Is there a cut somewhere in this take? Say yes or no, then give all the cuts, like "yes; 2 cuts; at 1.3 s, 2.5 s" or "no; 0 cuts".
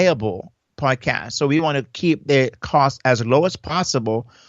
no; 0 cuts